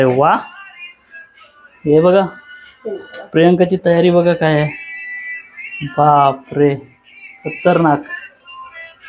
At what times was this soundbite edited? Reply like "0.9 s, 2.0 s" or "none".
none